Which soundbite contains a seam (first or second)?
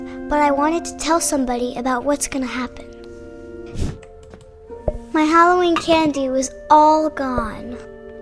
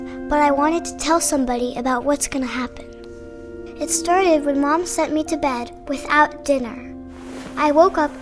first